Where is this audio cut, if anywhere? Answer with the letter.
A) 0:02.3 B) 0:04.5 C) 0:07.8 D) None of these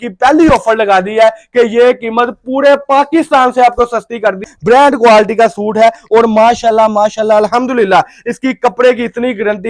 B